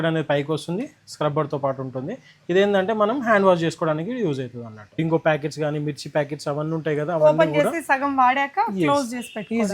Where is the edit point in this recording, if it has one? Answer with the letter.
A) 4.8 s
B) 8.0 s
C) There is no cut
A